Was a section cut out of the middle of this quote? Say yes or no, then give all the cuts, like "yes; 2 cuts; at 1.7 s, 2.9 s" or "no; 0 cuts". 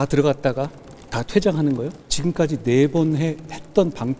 yes; 1 cut; at 2.0 s